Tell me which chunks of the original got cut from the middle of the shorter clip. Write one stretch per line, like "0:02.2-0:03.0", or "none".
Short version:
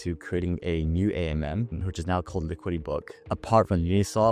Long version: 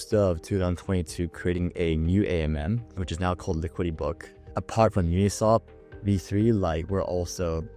0:04.3-0:04.4